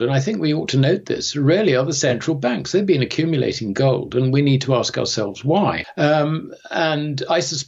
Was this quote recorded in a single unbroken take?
no; 1 cut; at 5.8 s

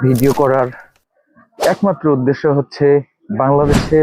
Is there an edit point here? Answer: no; 0 cuts

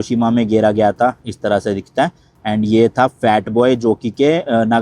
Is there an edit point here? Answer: no; 0 cuts

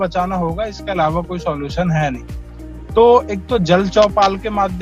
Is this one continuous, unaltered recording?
yes; 0 cuts

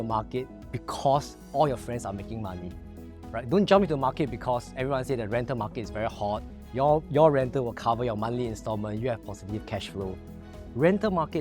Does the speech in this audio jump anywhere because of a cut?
no; 0 cuts

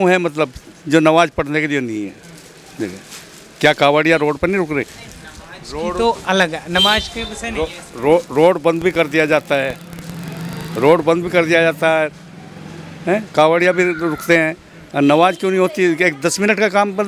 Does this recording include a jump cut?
no; 0 cuts

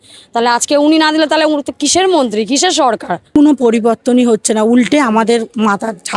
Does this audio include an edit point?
yes; 1 cut; at 3.1 s

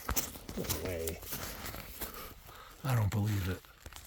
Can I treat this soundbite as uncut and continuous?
yes; 0 cuts

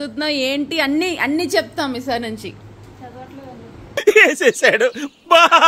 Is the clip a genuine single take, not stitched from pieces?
yes; 0 cuts

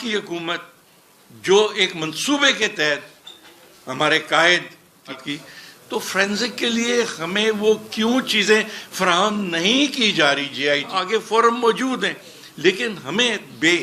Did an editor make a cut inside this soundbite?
yes; 2 cuts; at 5.2 s, 10.9 s

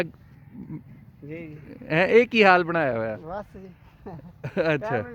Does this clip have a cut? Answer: no; 0 cuts

